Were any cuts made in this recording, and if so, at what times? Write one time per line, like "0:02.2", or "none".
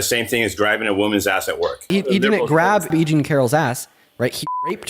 0:01.9
0:02.9